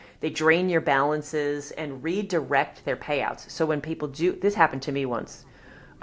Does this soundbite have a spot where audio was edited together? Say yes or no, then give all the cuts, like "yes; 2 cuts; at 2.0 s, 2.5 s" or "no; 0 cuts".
no; 0 cuts